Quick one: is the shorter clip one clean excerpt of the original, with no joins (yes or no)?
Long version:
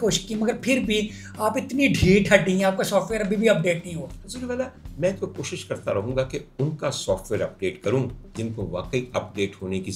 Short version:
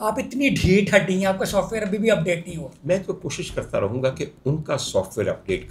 no